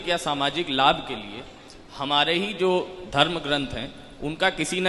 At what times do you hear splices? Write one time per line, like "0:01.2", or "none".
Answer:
none